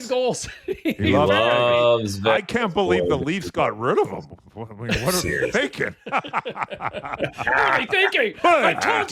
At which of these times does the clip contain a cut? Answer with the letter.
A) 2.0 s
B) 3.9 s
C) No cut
C